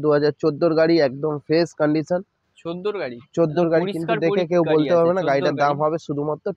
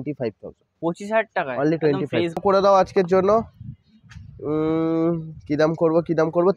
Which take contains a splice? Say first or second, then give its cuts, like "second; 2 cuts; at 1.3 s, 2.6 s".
second; 1 cut; at 2.4 s